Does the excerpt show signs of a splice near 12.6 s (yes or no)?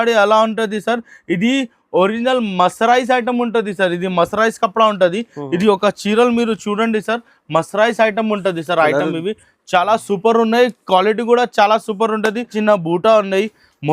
yes